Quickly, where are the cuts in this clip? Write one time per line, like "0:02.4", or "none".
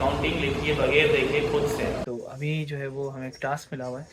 0:02.0